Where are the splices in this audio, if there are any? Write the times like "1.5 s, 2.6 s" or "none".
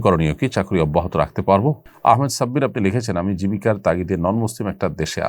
1.9 s